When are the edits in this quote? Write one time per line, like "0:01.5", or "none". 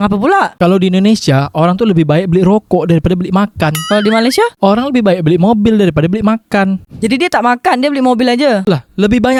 none